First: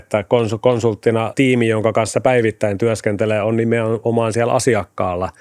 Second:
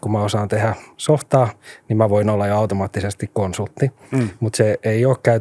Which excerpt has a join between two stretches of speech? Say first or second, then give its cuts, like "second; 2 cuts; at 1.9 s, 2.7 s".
first; 1 cut; at 1.3 s